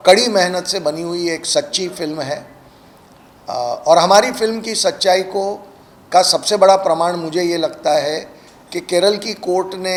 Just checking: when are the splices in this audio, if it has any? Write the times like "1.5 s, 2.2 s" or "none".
none